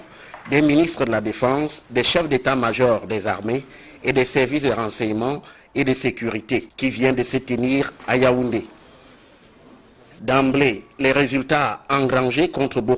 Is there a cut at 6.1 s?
yes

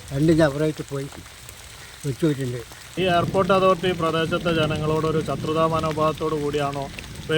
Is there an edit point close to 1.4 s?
no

